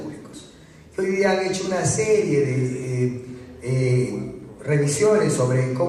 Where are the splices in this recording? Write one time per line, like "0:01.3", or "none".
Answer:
none